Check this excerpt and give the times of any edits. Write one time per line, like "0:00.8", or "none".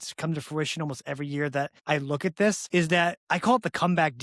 0:01.8
0:02.9